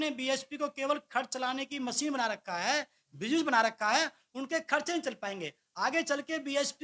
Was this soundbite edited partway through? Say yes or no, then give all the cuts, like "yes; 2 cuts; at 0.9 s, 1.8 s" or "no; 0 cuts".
no; 0 cuts